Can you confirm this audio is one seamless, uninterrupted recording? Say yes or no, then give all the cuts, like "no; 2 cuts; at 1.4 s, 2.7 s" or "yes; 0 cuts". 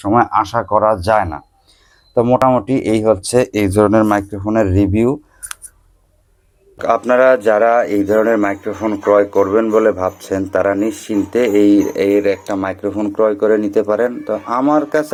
yes; 0 cuts